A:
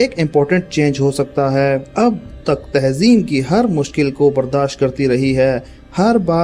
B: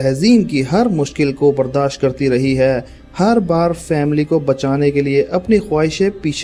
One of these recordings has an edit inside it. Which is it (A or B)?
A